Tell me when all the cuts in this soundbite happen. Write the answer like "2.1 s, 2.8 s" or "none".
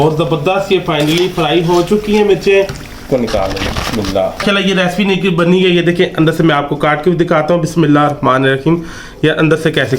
3.0 s, 4.4 s